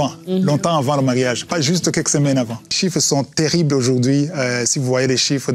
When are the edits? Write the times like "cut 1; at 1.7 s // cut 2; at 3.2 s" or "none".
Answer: cut 1; at 2.5 s